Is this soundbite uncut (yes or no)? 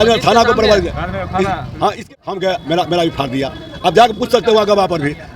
no